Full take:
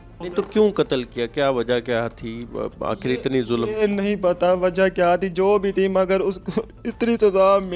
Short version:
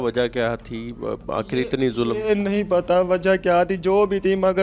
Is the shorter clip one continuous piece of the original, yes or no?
yes